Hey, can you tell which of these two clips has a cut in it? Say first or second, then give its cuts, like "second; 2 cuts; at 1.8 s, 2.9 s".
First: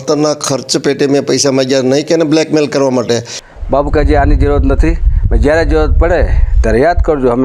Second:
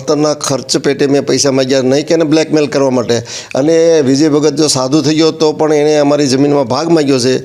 first; 1 cut; at 3.4 s